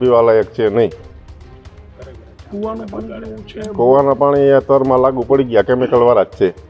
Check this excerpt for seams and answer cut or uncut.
uncut